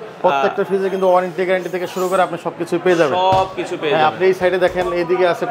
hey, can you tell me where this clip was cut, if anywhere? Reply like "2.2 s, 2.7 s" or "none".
none